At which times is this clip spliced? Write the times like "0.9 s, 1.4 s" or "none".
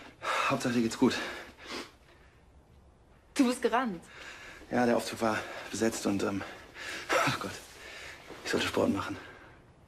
2.4 s